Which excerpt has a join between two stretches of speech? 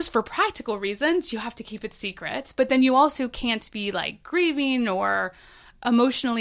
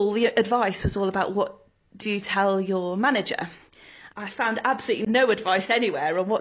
second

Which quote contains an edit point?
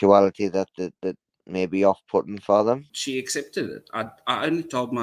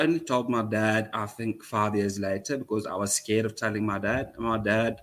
first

